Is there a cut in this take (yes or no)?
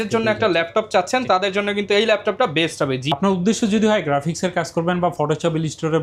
no